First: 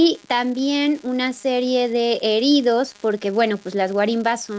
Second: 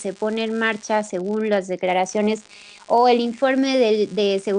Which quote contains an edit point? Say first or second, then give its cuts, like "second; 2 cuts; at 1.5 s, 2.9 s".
first; 1 cut; at 3.1 s